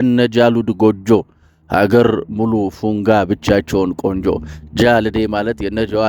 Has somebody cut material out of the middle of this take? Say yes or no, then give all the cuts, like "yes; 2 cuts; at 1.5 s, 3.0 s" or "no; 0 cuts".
no; 0 cuts